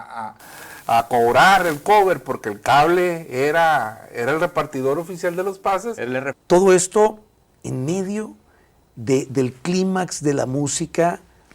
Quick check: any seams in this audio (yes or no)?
yes